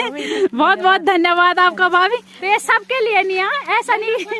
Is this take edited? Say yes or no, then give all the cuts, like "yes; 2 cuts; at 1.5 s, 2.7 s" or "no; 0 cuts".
yes; 1 cut; at 2.3 s